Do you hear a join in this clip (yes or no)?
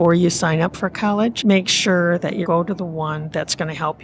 yes